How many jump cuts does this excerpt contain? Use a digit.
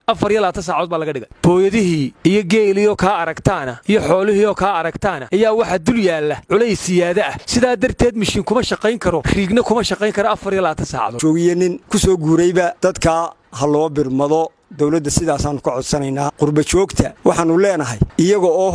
1